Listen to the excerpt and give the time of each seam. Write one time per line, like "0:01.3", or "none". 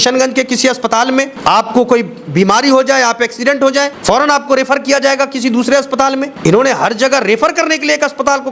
0:01.3
0:03.9
0:06.3